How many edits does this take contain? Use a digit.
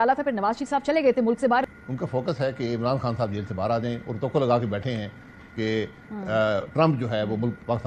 1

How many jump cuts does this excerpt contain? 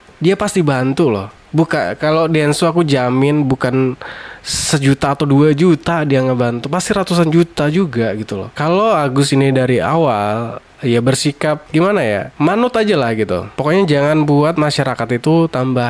1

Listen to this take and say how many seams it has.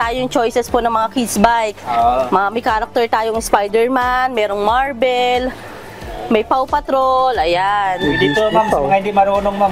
0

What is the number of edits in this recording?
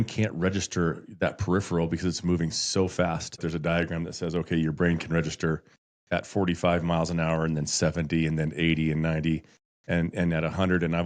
1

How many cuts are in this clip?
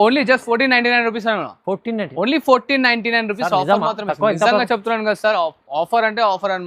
0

